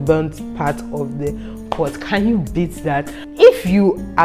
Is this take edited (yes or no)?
yes